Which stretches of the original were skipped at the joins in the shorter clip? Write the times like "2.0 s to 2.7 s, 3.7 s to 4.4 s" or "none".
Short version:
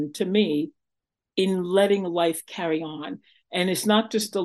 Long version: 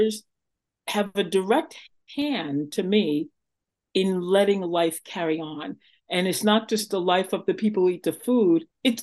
none